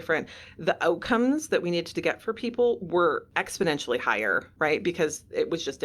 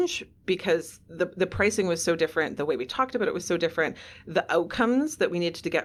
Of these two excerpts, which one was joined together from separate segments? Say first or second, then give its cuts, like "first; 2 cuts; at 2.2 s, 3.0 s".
first; 2 cuts; at 3.4 s, 4.5 s